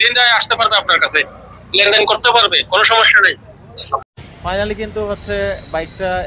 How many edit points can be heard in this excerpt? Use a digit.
1